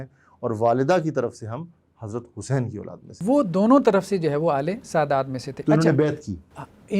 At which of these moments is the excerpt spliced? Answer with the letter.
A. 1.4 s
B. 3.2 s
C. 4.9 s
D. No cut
B